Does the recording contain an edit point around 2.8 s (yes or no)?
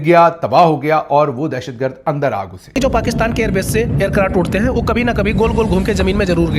yes